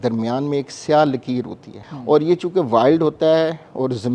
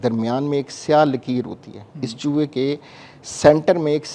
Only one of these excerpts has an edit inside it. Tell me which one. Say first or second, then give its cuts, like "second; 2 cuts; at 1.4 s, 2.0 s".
first; 1 cut; at 1.9 s